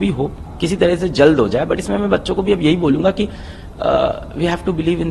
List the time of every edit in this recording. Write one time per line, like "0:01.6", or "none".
none